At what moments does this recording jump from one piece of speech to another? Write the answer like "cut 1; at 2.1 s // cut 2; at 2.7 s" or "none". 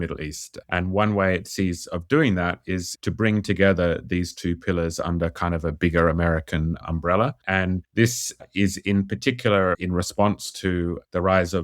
cut 1; at 7.7 s // cut 2; at 9.8 s